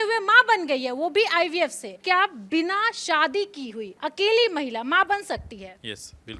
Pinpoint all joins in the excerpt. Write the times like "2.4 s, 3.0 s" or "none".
2.0 s

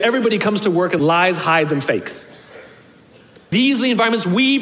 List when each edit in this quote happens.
1.0 s, 3.5 s

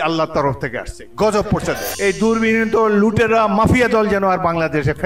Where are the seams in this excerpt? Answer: 1.9 s

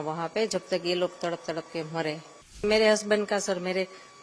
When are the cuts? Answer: 2.6 s

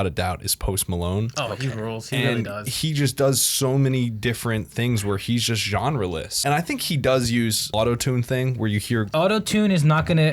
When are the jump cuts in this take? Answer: 6.3 s, 7.7 s, 9.1 s

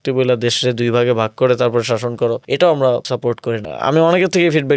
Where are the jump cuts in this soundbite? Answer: 2.4 s, 3.4 s

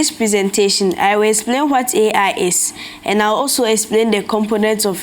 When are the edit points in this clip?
none

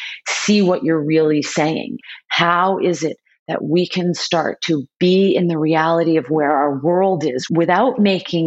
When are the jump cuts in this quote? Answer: 2.0 s, 7.4 s

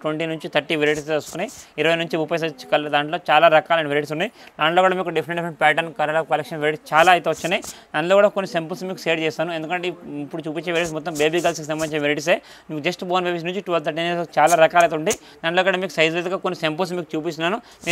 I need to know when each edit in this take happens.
none

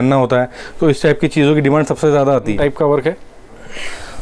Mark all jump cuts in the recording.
2.5 s

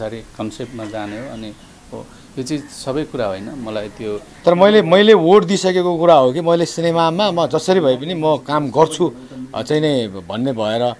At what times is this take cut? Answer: 4.3 s

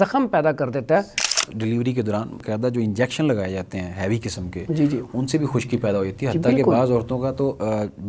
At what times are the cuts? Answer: 1.5 s, 2.4 s

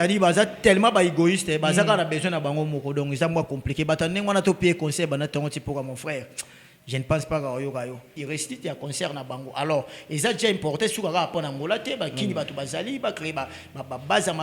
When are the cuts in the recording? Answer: 8.1 s

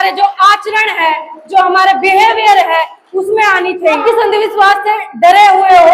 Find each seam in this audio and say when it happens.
4.0 s

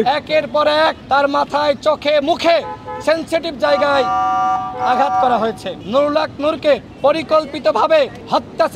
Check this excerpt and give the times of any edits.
5.8 s

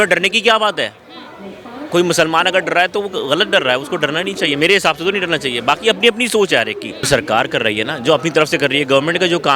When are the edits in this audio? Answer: 7.1 s

